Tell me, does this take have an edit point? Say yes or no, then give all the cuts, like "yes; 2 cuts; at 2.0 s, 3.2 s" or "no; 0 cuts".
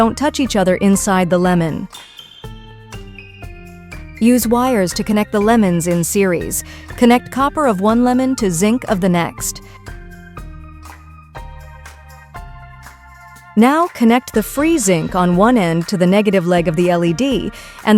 yes; 4 cuts; at 1.9 s, 3.4 s, 9.3 s, 13.2 s